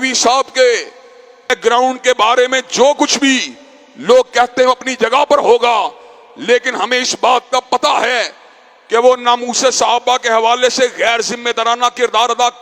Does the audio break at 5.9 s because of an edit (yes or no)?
no